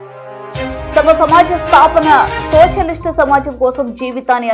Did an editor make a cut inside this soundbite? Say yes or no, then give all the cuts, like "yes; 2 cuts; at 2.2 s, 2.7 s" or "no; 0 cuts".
yes; 1 cut; at 1.0 s